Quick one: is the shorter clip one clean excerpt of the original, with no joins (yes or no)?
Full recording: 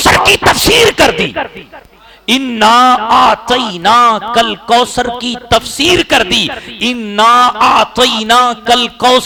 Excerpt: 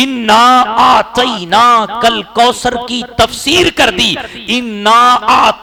yes